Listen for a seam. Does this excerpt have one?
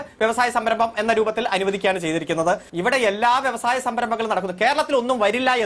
yes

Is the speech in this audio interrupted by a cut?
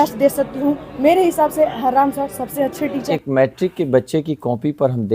yes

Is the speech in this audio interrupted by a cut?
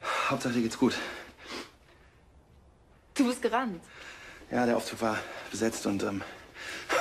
yes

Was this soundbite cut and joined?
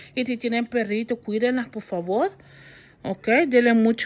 no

